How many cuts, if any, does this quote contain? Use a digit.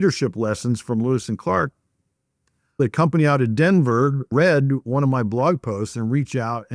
1